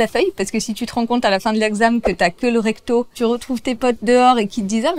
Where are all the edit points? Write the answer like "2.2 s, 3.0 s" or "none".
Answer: 3.1 s

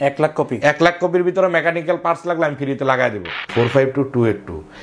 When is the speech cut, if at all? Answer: 3.5 s

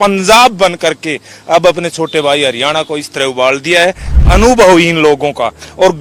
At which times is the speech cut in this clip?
4.1 s

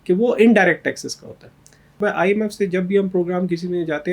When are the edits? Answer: 2.0 s

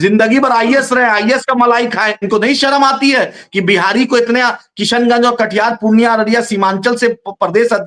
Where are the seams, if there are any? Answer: 2.2 s

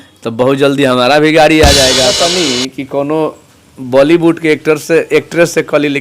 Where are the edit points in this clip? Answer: 2.1 s

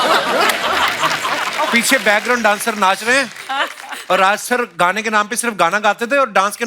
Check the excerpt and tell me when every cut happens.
none

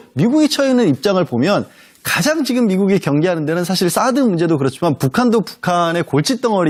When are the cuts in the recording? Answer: none

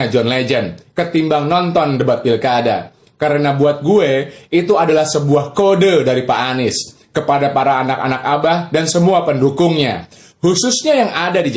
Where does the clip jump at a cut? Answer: none

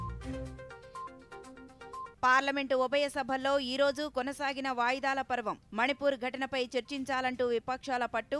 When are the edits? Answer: 1.8 s

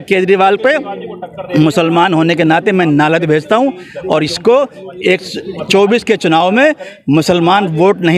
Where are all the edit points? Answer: none

